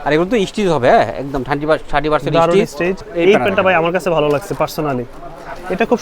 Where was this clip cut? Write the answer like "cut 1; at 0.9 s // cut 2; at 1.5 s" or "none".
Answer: cut 1; at 3.1 s

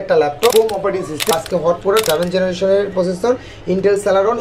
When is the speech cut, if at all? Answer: cut 1; at 1.3 s

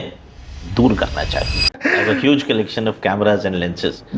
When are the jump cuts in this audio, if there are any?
cut 1; at 1.8 s

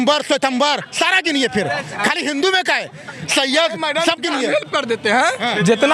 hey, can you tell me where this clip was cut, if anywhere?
none

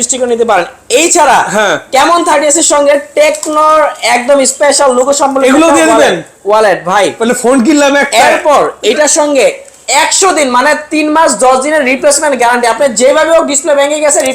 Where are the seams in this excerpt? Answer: none

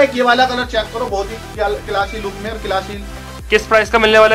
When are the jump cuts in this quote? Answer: none

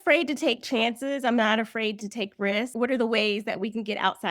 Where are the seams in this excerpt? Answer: cut 1; at 2.7 s

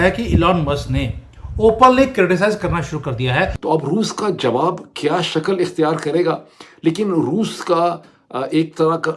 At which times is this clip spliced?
cut 1; at 3.6 s

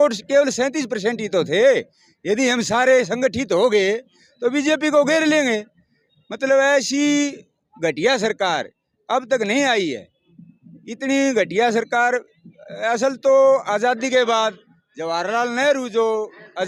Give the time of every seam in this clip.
none

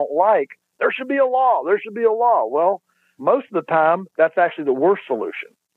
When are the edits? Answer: cut 1; at 4.1 s

